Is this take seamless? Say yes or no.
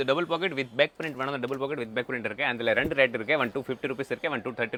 yes